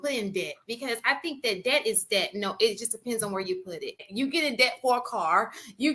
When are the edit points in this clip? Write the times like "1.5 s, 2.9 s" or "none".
4.1 s